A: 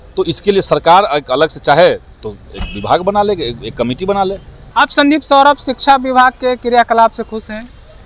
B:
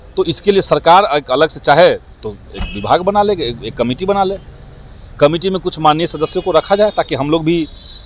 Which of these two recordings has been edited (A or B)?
A